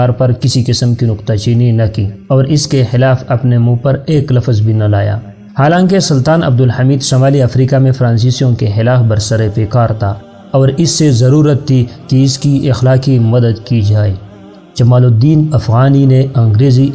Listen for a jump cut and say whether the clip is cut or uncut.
uncut